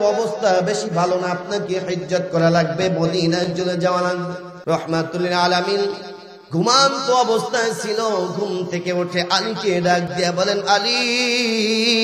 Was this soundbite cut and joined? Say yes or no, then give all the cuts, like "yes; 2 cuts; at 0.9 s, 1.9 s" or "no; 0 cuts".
yes; 1 cut; at 4.5 s